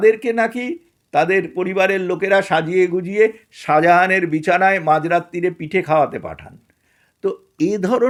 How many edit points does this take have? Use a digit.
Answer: 0